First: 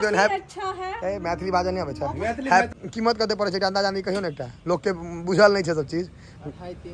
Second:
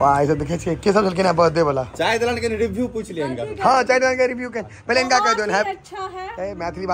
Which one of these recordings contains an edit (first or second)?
first